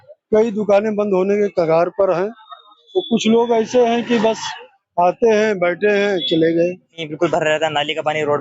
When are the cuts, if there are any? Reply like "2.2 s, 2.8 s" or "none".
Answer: 7.0 s